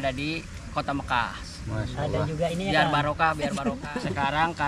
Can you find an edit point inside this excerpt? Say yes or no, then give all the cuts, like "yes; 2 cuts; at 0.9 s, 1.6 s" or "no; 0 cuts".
yes; 1 cut; at 3.7 s